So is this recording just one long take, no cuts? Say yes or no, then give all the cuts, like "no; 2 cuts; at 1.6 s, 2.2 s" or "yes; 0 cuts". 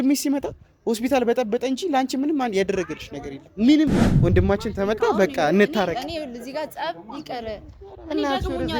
no; 1 cut; at 4.1 s